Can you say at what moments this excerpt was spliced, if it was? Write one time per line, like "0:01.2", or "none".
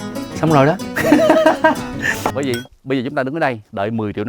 0:02.3